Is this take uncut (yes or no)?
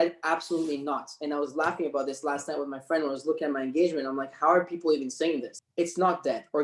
no